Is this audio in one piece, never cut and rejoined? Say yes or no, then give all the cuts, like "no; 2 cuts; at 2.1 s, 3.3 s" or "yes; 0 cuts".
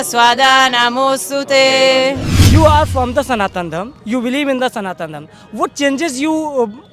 no; 1 cut; at 2.3 s